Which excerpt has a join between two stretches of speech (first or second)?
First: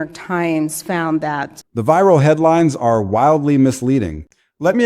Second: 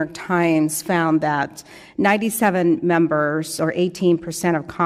second